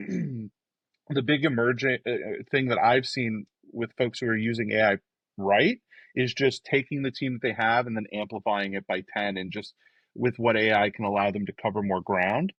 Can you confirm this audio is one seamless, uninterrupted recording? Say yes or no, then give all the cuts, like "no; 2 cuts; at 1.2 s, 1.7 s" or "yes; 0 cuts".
yes; 0 cuts